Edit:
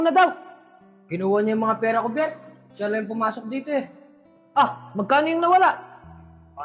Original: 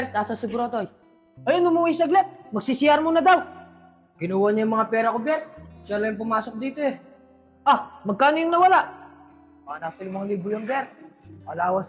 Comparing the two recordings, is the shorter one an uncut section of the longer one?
yes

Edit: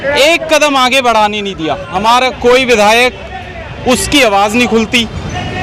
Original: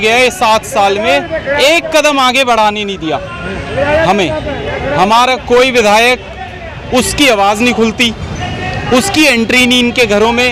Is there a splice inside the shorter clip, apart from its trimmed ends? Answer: yes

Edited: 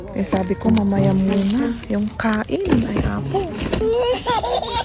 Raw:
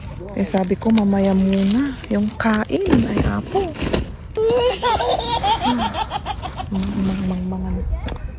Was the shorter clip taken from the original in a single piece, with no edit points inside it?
no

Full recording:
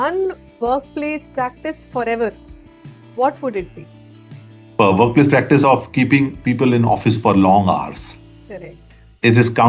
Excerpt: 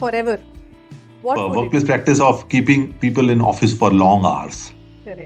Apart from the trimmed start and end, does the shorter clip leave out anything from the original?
yes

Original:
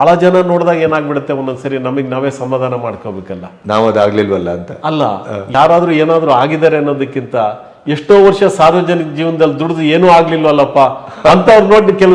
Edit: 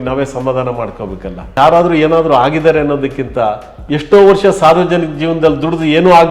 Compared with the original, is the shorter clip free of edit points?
no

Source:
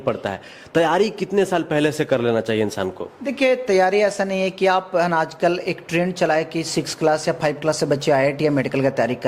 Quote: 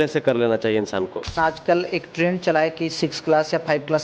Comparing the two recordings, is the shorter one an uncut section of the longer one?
no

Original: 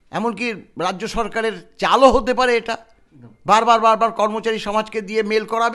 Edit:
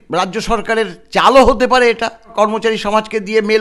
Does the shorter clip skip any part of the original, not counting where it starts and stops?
yes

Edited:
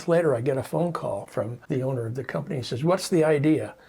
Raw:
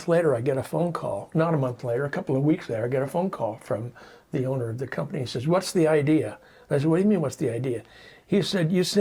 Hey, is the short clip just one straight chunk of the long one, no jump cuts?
no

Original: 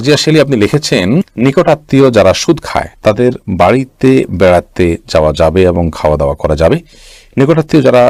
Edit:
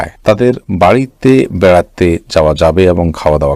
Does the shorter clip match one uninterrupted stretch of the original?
yes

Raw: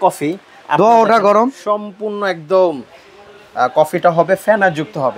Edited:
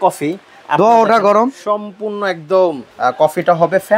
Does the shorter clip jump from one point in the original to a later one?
yes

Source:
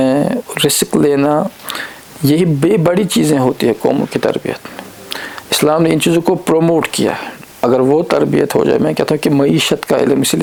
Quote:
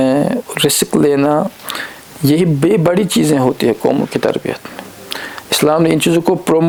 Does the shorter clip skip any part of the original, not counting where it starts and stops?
no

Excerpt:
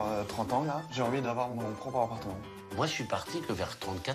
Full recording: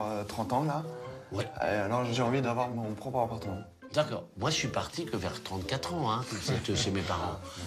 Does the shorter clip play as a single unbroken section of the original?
no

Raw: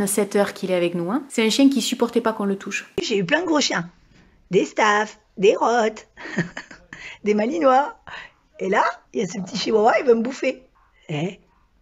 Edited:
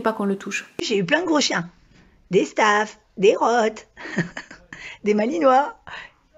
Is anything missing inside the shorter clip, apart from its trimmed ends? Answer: no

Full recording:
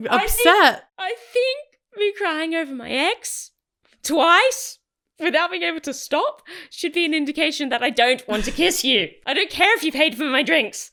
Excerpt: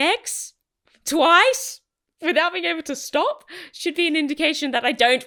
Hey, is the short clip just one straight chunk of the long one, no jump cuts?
yes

